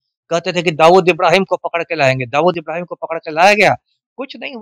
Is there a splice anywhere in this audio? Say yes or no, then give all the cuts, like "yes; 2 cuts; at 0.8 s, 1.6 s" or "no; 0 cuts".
no; 0 cuts